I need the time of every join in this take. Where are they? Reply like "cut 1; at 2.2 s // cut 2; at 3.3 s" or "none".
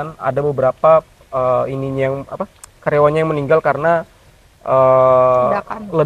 none

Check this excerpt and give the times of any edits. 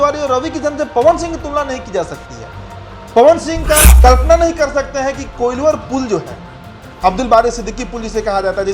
cut 1; at 3.9 s

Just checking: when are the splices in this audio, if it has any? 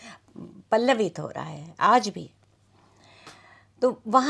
none

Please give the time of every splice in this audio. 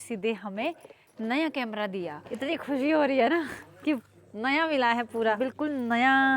cut 1; at 2.2 s // cut 2; at 5.4 s

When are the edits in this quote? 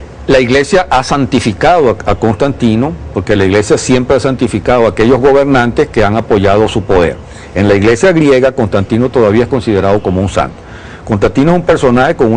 cut 1; at 8.9 s

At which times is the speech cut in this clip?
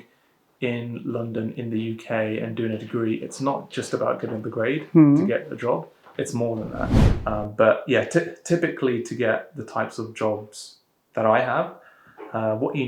cut 1; at 7.1 s

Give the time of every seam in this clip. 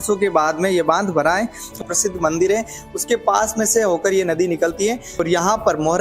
cut 1; at 1.8 s // cut 2; at 5.1 s

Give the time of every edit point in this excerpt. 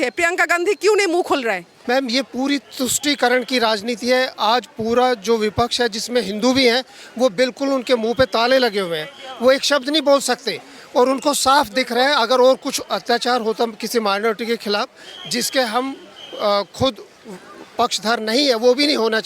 cut 1; at 1.7 s

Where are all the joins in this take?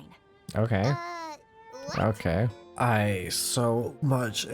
cut 1; at 2.5 s

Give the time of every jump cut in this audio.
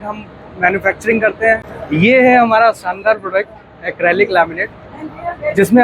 cut 1; at 1.7 s

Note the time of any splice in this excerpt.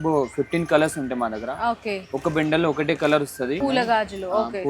cut 1; at 3.6 s

